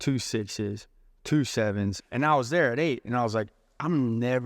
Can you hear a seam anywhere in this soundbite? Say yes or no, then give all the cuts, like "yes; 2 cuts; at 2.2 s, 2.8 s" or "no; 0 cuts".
yes; 1 cut; at 2.0 s